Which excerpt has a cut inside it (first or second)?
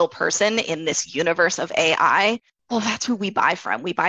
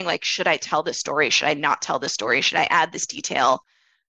first